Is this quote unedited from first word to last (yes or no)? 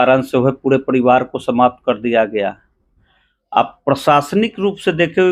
yes